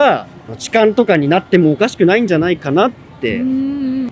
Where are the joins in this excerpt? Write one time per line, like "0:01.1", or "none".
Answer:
none